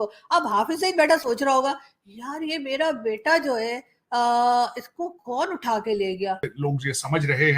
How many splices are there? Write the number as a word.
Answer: one